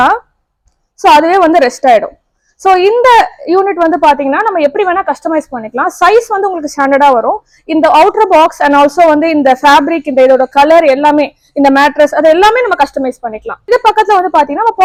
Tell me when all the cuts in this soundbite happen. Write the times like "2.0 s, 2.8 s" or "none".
none